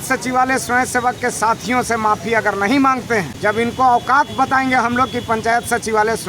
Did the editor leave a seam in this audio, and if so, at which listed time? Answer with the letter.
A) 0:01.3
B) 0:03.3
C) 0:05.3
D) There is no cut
B